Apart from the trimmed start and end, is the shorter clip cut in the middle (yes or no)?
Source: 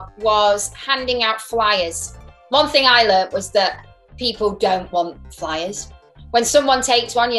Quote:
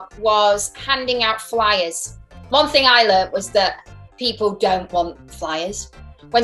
no